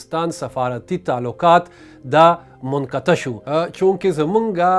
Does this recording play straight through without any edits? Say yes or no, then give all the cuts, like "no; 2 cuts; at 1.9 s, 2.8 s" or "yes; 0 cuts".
no; 1 cut; at 3.4 s